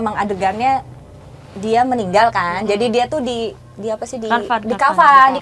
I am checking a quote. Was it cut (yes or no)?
no